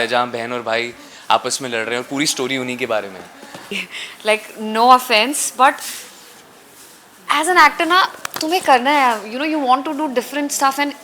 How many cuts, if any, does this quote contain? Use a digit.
1